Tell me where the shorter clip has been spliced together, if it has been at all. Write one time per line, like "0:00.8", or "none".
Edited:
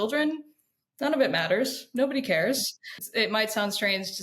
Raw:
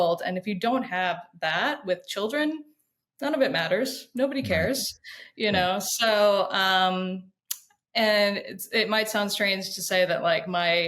0:03.0

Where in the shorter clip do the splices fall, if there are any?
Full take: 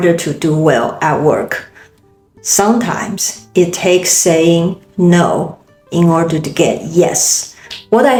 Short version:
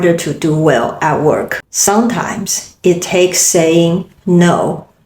0:01.6

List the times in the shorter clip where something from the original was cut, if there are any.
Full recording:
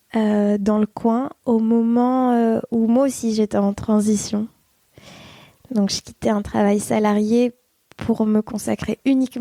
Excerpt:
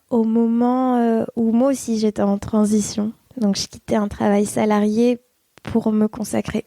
0:03.2

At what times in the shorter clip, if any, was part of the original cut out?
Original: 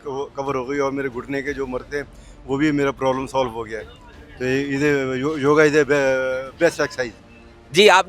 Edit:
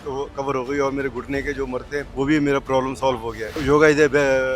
0:02.1
0:03.6

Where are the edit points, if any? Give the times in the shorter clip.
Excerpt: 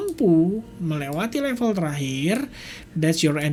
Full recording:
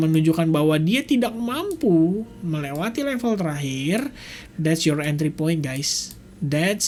none

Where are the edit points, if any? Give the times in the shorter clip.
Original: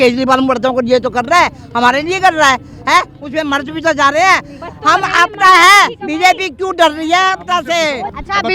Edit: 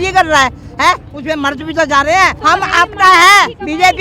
0:02.4

